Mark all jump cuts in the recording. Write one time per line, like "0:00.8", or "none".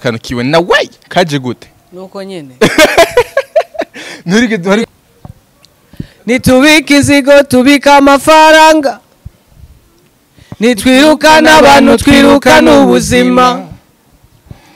0:04.8